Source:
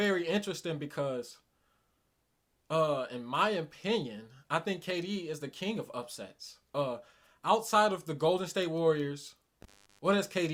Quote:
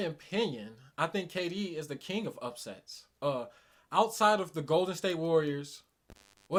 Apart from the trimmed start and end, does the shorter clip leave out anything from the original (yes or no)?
no